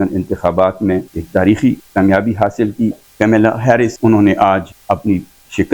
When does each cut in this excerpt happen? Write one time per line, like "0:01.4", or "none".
0:01.1
0:01.8
0:03.0
0:03.9
0:04.7